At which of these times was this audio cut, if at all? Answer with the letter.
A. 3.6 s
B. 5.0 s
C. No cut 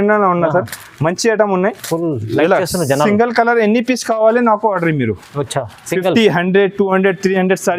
C